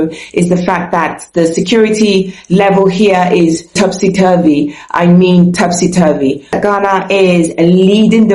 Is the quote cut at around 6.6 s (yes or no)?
yes